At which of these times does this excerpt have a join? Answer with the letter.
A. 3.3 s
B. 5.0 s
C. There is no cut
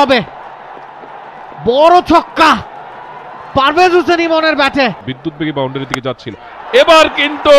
B